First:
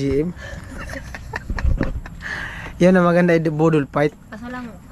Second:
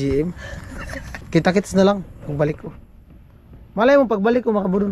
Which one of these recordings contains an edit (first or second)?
second